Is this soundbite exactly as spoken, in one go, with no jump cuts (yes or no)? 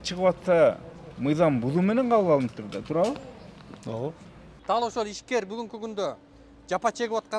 no